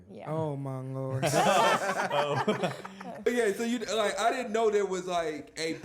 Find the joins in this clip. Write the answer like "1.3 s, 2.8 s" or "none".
3.3 s